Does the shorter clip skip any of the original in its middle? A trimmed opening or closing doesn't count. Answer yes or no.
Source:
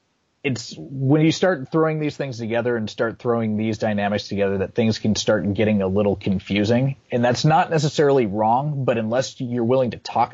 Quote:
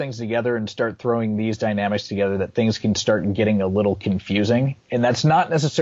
no